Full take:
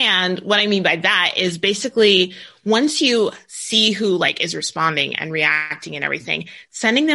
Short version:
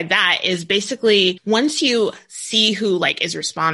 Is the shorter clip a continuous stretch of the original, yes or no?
no